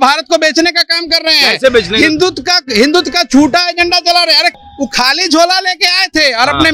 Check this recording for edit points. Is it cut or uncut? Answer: cut